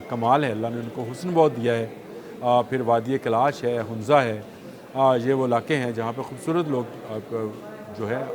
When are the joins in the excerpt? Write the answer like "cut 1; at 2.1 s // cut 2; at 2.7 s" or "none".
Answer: none